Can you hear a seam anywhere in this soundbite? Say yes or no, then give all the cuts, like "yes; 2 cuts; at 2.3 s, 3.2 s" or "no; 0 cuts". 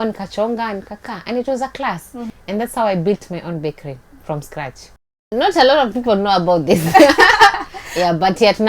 yes; 2 cuts; at 2.3 s, 5.1 s